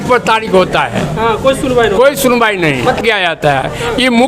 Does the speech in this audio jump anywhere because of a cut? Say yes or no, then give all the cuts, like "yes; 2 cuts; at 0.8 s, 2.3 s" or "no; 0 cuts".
yes; 1 cut; at 3.0 s